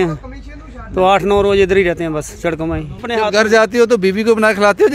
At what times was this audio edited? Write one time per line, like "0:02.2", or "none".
0:03.0